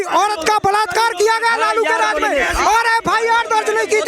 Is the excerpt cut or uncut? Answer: uncut